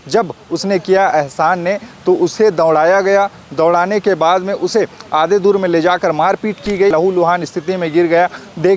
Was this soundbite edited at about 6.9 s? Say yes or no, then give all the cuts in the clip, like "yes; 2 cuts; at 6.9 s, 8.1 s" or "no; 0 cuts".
yes; 1 cut; at 6.9 s